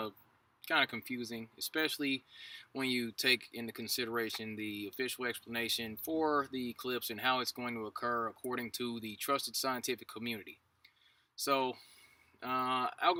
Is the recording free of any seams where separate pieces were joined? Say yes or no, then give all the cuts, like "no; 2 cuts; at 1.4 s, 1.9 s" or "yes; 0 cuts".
yes; 0 cuts